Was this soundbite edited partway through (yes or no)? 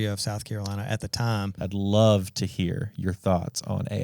yes